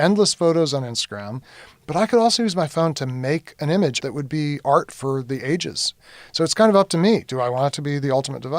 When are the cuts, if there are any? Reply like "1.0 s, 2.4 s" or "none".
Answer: 1.6 s, 4.0 s, 6.0 s